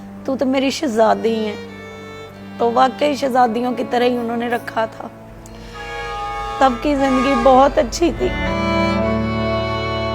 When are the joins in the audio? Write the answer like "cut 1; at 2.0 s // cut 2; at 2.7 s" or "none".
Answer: cut 1; at 5.1 s